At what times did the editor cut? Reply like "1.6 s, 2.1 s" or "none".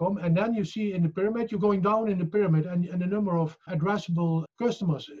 4.1 s